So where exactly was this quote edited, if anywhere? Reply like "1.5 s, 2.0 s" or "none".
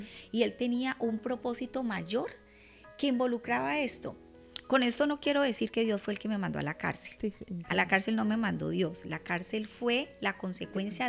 none